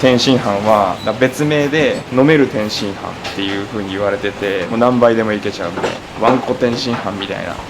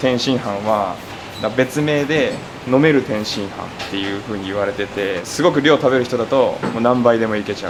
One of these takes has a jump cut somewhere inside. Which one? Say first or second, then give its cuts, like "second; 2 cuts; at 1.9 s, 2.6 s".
first; 4 cuts; at 1.0 s, 2.0 s, 4.7 s, 6.0 s